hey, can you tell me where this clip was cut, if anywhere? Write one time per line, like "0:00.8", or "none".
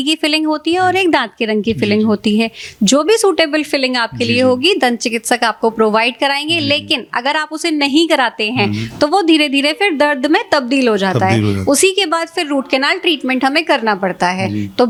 none